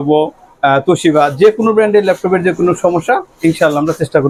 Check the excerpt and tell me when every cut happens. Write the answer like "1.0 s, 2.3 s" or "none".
none

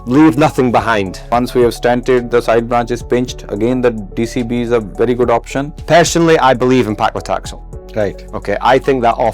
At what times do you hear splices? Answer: 1.3 s, 5.7 s

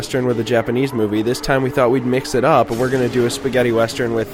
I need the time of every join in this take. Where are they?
none

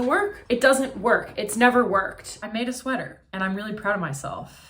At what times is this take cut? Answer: 2.3 s, 3.2 s

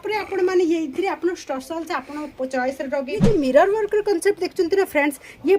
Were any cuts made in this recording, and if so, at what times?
3.2 s

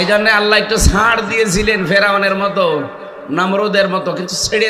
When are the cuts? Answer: none

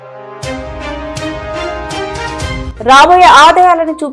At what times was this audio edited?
none

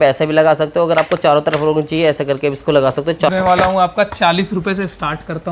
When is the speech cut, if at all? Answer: 3.3 s

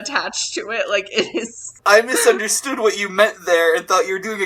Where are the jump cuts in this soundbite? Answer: 1.8 s

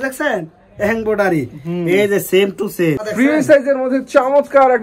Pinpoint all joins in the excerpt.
3.1 s

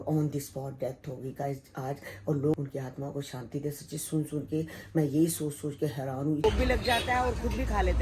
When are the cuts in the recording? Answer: 2.5 s, 6.4 s

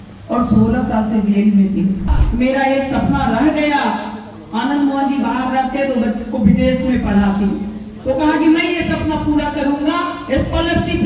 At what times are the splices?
2.1 s

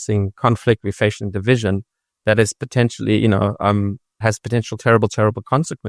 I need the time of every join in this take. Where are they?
none

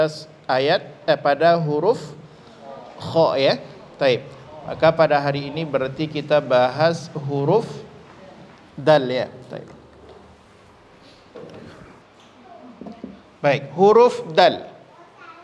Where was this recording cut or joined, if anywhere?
12.0 s

